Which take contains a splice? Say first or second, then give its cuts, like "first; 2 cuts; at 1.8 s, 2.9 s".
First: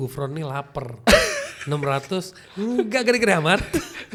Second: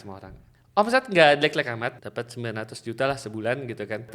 second; 1 cut; at 2.0 s